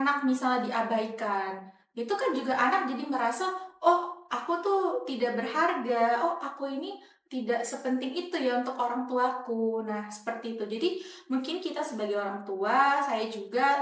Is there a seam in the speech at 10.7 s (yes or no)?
no